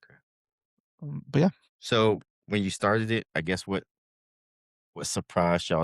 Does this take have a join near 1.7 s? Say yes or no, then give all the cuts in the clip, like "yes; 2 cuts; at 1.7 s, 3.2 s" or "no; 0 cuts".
yes; 2 cuts; at 1.7 s, 2.3 s